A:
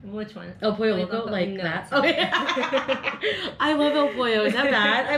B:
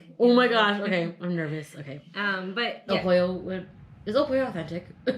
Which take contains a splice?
B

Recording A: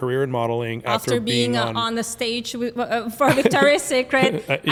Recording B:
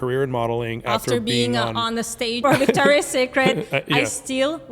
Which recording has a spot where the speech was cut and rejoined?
B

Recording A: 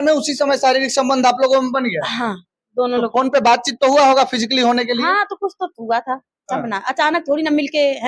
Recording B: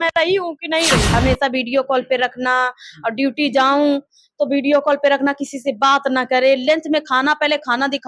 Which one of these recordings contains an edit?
B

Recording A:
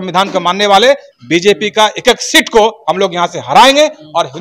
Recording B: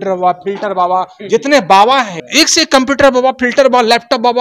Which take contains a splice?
B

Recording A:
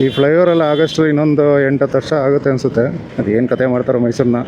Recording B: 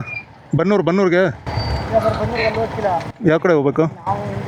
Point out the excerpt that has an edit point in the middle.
A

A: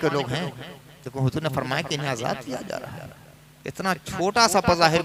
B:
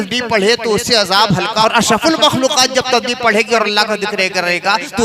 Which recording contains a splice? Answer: B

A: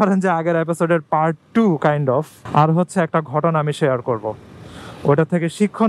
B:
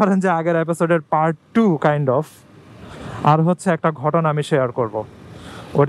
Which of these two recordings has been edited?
A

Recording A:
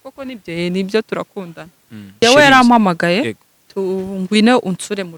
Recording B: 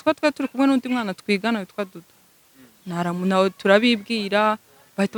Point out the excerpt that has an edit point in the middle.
A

